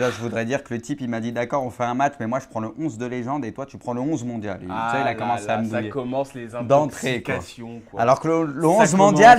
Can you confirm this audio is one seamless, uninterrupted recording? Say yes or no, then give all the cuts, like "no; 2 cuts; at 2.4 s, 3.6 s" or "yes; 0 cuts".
no; 1 cut; at 2.9 s